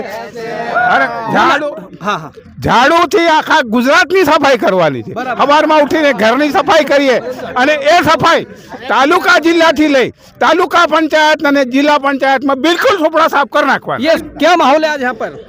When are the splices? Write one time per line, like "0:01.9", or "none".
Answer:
0:14.2